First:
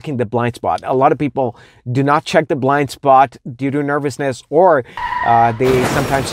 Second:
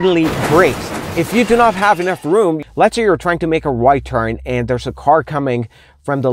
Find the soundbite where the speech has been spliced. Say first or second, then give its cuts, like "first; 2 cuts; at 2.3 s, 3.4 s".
second; 1 cut; at 2.6 s